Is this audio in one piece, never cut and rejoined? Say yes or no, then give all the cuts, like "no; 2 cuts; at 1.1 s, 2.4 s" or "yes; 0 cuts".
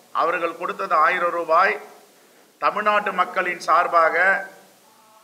yes; 0 cuts